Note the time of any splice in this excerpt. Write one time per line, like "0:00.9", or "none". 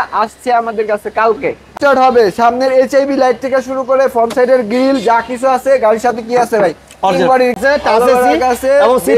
0:01.8
0:07.6